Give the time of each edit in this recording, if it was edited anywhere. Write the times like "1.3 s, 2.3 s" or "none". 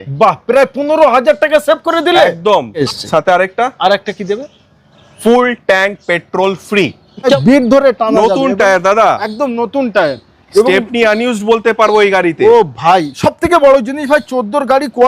2.8 s, 7.4 s